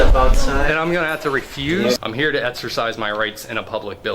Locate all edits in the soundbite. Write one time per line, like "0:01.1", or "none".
0:02.0